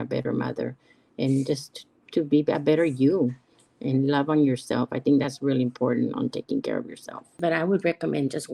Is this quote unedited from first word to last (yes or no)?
no